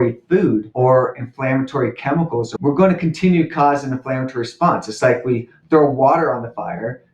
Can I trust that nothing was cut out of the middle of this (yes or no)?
no